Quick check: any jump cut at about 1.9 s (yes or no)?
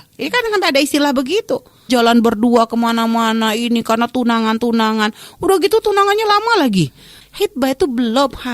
yes